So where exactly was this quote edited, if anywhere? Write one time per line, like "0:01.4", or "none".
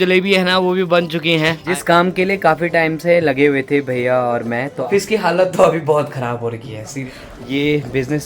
0:01.7
0:04.7
0:07.0